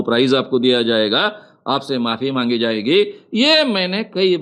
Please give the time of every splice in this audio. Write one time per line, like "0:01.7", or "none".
none